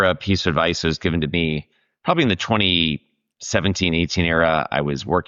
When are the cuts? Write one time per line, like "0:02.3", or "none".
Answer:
none